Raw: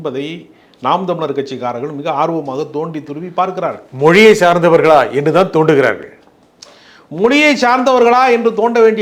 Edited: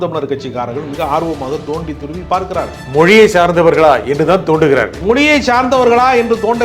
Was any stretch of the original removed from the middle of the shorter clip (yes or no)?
yes